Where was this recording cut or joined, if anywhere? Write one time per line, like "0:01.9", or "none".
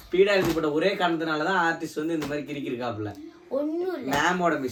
none